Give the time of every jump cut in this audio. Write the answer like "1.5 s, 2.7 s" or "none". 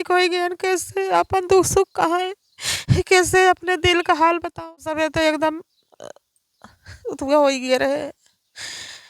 4.7 s